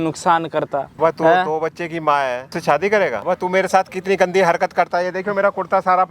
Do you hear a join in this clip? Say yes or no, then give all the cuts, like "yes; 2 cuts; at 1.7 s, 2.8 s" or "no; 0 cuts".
yes; 3 cuts; at 0.9 s, 2.5 s, 3.2 s